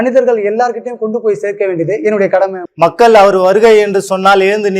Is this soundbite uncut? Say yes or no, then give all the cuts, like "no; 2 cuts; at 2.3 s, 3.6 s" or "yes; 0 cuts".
no; 1 cut; at 2.6 s